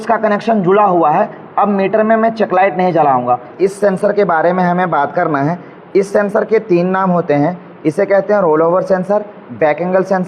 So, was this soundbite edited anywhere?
yes; 1 cut; at 3.5 s

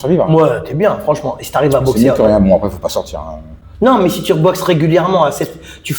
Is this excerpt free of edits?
yes; 0 cuts

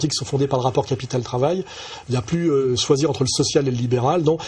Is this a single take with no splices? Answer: no; 1 cut; at 2.7 s

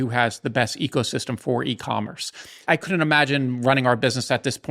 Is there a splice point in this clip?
yes; 1 cut; at 2.6 s

